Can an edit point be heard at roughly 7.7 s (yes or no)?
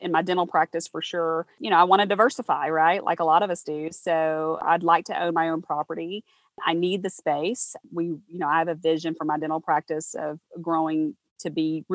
no